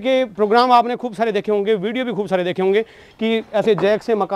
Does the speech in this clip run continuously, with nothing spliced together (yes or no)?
yes